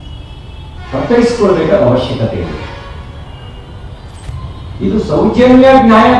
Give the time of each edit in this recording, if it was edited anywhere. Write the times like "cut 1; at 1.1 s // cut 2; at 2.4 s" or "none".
cut 1; at 4.3 s